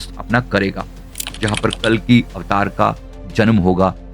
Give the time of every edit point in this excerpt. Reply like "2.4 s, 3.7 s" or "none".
1.2 s